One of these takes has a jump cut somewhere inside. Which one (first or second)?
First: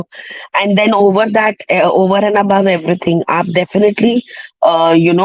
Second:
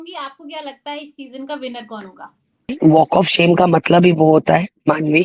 second